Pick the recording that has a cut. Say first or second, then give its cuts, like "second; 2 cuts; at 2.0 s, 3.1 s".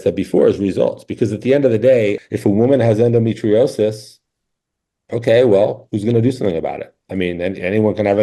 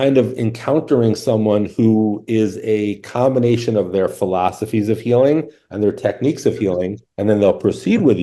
first; 1 cut; at 2.3 s